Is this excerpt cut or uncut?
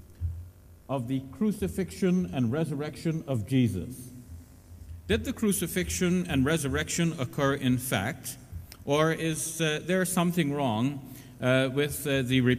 uncut